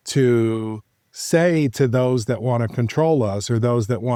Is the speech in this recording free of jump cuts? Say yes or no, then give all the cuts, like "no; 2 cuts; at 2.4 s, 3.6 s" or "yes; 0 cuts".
yes; 0 cuts